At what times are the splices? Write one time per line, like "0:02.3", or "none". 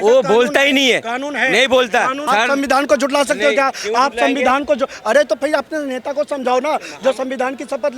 0:02.2